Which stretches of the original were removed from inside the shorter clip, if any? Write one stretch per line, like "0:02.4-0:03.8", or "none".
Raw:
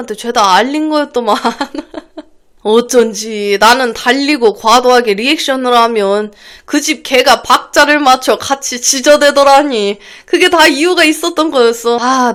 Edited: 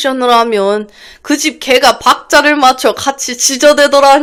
none